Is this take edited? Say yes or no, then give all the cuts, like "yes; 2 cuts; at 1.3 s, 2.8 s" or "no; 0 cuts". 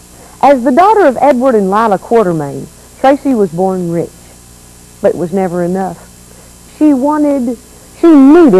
yes; 1 cut; at 6.2 s